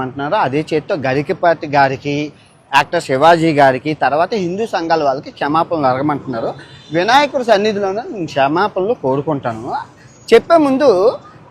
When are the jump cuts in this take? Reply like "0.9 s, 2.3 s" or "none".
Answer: none